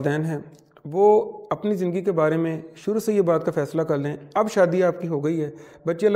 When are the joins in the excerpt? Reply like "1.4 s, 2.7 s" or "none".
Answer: none